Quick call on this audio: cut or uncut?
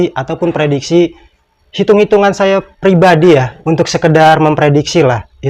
uncut